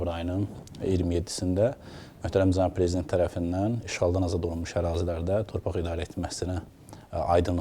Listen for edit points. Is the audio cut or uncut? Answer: uncut